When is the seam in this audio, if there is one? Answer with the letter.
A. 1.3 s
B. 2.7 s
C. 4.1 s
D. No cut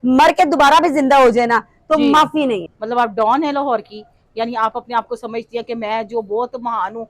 B